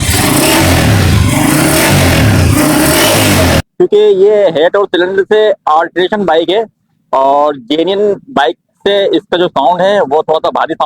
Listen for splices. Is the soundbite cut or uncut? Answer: cut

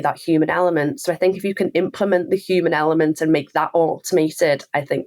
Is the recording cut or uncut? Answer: uncut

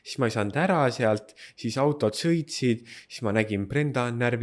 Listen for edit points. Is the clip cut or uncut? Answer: uncut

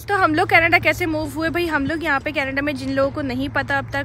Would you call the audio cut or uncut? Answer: uncut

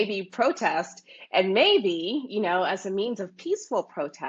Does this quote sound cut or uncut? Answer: uncut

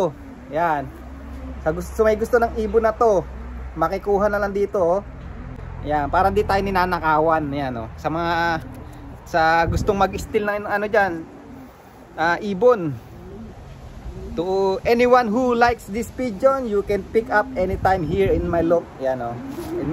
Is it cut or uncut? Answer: uncut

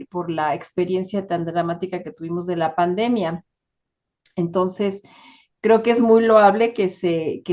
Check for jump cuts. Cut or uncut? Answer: uncut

